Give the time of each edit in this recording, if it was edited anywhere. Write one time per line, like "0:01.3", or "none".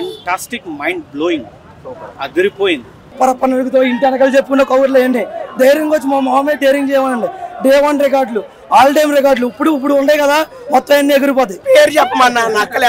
0:03.1
0:11.6

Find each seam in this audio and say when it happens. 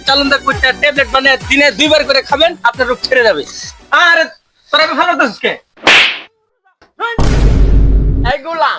0:05.7

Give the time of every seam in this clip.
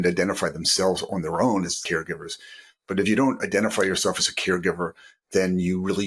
0:01.8

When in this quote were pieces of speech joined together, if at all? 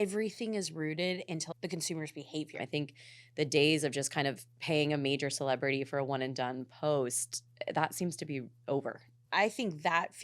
0:01.5
0:02.6
0:09.2

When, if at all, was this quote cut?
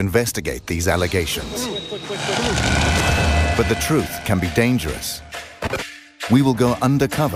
0:06.4

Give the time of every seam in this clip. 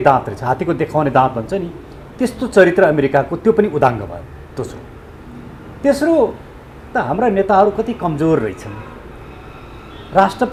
none

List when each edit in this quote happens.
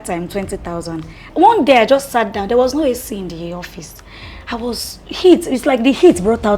0:01.3

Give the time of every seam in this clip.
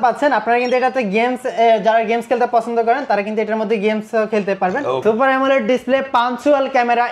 0:05.0

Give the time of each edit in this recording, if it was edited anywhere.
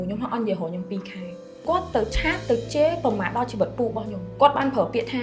0:01.6
0:04.3

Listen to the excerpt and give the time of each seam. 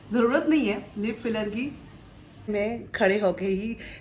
0:02.5

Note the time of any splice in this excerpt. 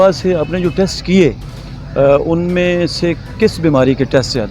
none

